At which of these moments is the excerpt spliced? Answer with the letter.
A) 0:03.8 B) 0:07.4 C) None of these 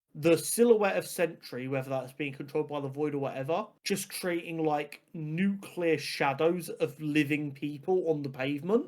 A